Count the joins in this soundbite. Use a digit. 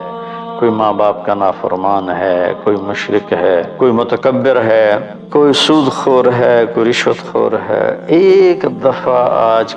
3